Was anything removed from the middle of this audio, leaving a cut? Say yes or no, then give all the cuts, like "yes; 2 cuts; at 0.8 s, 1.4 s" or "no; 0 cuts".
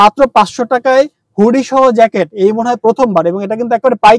no; 0 cuts